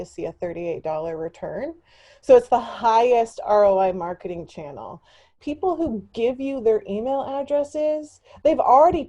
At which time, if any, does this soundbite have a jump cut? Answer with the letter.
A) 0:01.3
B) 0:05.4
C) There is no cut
B